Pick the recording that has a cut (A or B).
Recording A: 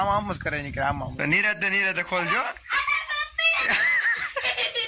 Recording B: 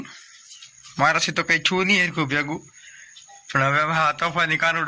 A